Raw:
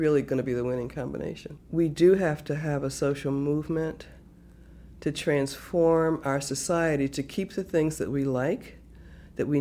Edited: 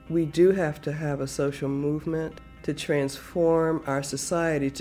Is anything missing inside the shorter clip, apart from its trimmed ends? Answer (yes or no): yes